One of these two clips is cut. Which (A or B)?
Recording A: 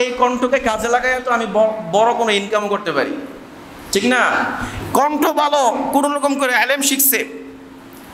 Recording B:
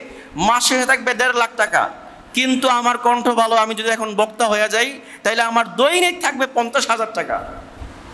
A